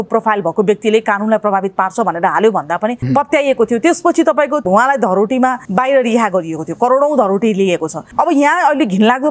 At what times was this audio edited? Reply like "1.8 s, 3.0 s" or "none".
3.0 s, 4.6 s, 5.6 s, 8.0 s